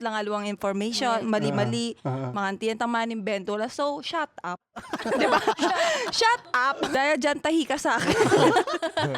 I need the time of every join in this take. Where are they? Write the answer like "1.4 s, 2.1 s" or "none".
6.9 s